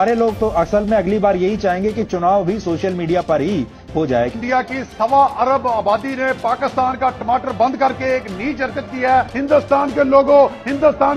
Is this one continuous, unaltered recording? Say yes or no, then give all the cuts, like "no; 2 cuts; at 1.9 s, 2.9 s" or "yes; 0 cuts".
no; 2 cuts; at 4.3 s, 9.3 s